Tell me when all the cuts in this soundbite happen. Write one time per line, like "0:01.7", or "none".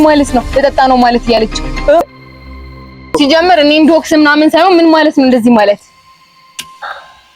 0:02.1